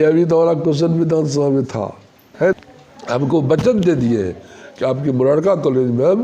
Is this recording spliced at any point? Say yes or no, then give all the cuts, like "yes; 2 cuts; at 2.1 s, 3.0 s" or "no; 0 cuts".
yes; 1 cut; at 2.5 s